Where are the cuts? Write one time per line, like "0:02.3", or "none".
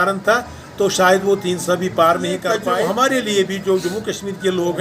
0:02.6